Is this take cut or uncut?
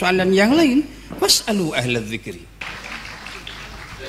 cut